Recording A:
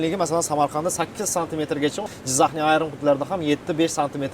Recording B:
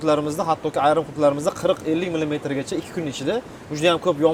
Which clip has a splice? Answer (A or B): A